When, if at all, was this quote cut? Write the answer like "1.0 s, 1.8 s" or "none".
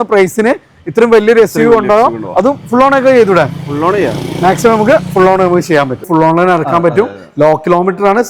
6.0 s